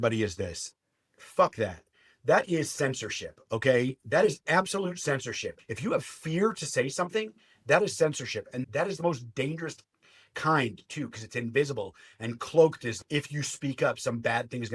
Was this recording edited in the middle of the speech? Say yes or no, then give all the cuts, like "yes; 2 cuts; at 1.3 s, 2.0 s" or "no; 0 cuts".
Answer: yes; 2 cuts; at 5.5 s, 9.0 s